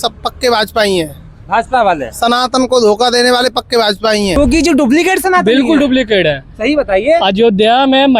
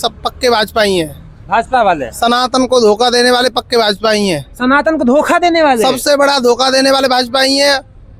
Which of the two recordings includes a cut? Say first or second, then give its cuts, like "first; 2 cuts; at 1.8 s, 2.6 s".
first; 1 cut; at 4.4 s